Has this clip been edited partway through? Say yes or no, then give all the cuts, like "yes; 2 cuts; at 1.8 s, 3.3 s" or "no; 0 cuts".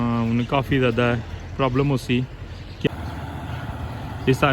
yes; 1 cut; at 2.9 s